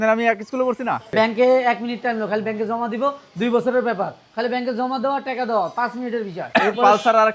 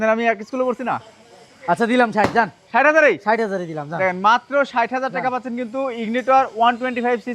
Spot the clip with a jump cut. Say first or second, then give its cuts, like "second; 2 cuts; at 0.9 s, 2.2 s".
first; 2 cuts; at 1.1 s, 6.4 s